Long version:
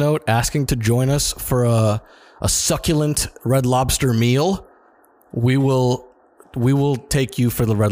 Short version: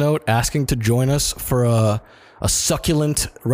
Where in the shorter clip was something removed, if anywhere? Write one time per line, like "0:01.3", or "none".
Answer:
none